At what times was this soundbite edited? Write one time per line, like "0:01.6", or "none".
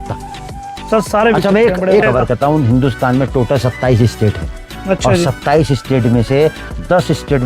0:02.0